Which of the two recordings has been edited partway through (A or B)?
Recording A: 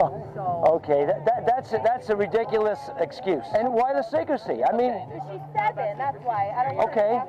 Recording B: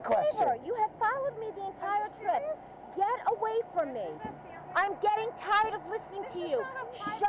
A